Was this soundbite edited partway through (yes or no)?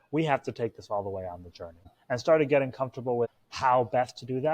yes